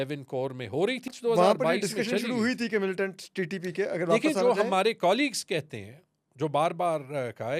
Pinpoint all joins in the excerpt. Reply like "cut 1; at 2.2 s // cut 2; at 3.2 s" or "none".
cut 1; at 1.2 s